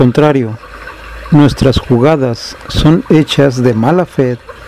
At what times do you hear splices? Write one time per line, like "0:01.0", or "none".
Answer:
0:01.9